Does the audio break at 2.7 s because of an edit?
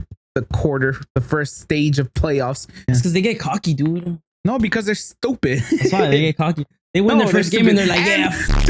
yes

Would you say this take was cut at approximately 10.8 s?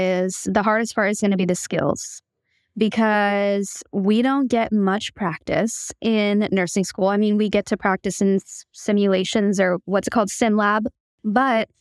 yes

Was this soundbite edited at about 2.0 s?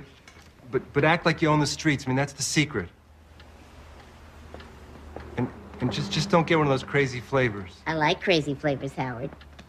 yes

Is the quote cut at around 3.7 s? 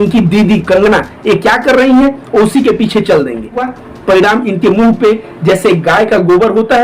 yes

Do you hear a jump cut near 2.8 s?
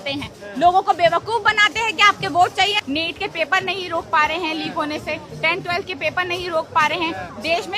yes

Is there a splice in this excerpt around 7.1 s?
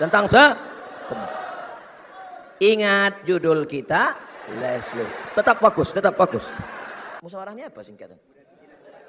yes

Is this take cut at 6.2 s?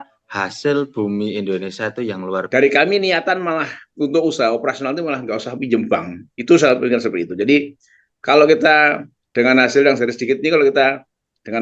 no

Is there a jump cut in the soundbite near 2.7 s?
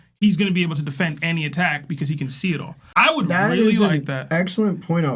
no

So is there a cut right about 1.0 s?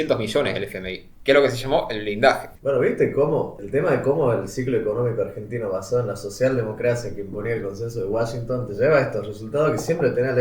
no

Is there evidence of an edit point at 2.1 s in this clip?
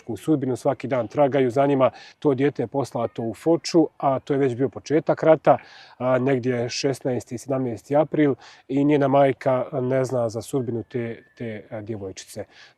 yes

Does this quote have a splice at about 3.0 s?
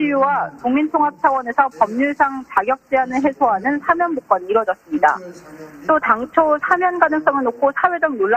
no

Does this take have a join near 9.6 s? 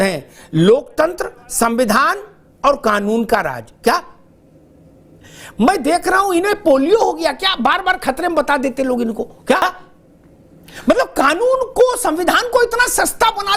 yes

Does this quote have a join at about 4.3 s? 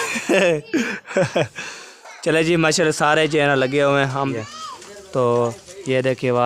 yes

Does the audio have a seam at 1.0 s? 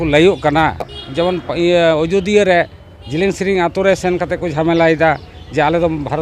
yes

